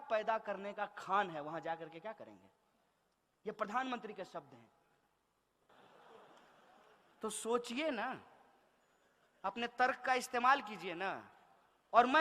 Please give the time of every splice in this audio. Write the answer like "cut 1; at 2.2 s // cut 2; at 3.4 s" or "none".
none